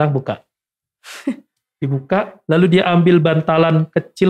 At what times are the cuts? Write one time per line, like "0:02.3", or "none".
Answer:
none